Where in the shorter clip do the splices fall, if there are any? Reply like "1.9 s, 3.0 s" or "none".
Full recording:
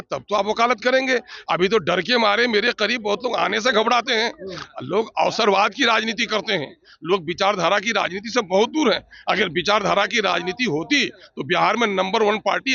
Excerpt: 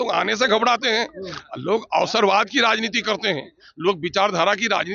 none